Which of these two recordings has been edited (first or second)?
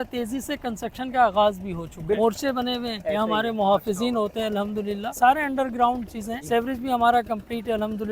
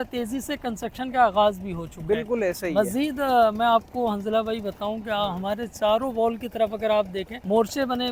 first